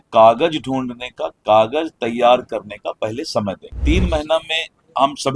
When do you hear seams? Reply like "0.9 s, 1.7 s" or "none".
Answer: 3.7 s